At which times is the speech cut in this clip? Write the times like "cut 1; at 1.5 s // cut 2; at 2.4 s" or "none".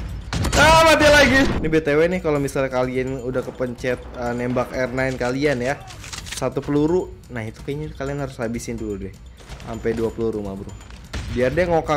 cut 1; at 1.6 s